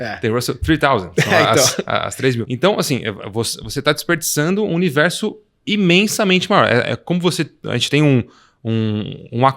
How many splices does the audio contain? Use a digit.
1